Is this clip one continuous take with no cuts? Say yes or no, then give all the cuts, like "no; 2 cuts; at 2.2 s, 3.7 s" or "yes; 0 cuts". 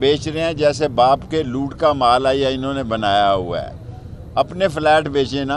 yes; 0 cuts